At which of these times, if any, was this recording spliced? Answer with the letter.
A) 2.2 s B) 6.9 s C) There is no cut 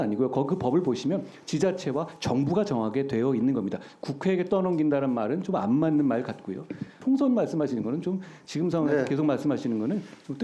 B